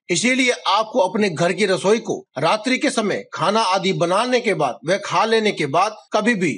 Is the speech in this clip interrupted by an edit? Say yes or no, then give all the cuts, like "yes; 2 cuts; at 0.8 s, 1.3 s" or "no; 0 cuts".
no; 0 cuts